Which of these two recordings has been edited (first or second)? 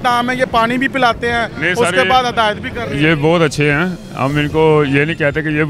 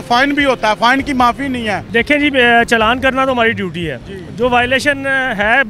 second